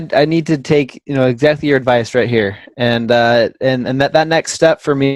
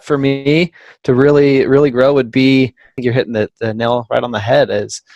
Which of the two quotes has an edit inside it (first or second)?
second